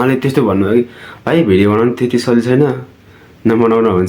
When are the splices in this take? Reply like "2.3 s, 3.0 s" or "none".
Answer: none